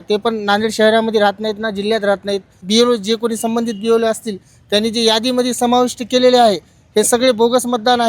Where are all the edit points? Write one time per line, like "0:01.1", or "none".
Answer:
0:02.6

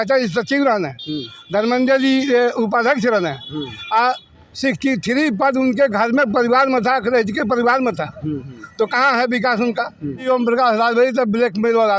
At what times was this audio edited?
0:10.2

